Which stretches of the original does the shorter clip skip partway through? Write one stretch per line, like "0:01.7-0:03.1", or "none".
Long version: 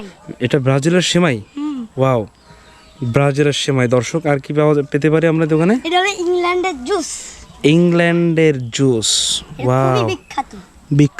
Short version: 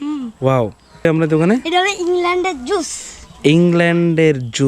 0:02.6-0:05.2